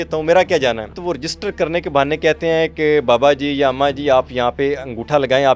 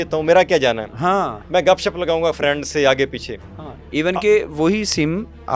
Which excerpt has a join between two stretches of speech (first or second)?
first